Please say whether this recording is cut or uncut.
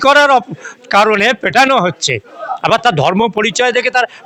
uncut